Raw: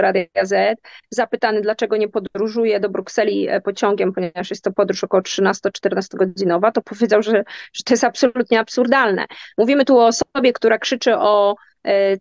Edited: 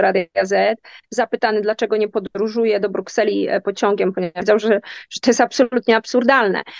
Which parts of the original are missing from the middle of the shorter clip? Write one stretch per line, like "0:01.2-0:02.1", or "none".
0:04.5-0:07.1